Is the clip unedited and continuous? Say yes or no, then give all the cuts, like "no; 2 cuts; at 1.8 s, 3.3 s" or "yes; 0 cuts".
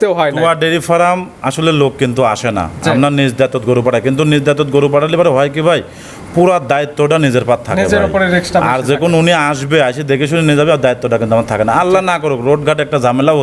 yes; 0 cuts